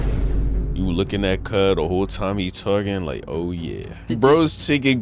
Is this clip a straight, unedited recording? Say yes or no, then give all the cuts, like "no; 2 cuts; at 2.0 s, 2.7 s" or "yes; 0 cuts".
no; 1 cut; at 4.1 s